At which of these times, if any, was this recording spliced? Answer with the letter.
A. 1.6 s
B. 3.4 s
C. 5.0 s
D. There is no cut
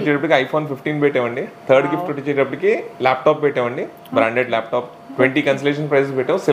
C